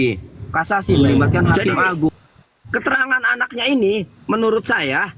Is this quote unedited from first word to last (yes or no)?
no